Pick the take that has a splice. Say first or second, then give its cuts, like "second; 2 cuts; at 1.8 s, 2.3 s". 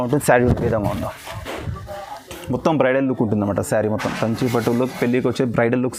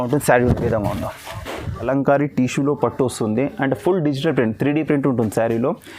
second; 1 cut; at 1.9 s